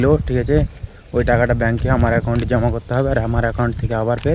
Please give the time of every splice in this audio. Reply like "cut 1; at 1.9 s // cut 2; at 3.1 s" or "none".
none